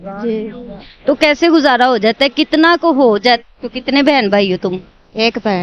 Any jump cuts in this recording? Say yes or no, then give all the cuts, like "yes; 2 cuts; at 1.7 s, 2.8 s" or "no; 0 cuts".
yes; 1 cut; at 3.4 s